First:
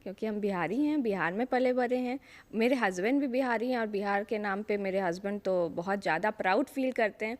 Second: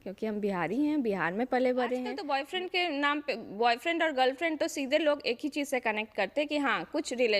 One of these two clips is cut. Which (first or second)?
second